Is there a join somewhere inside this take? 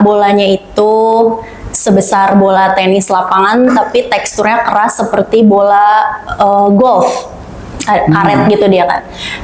no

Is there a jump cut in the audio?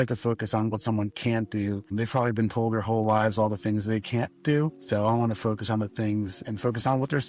yes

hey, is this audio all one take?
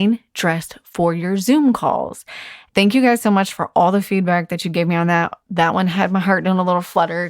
no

